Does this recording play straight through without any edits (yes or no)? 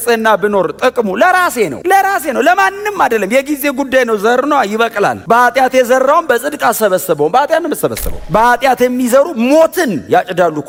yes